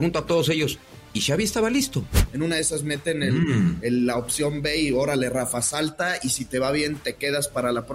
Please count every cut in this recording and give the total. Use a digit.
1